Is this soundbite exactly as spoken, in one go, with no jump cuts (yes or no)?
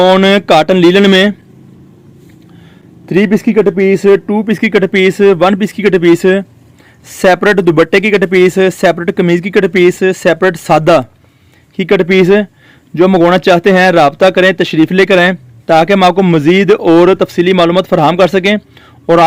yes